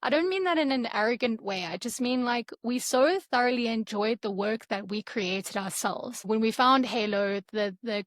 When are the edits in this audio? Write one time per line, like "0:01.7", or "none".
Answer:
0:06.3